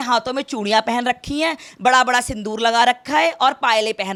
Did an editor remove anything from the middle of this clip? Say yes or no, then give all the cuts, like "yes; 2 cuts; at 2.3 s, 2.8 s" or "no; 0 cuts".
no; 0 cuts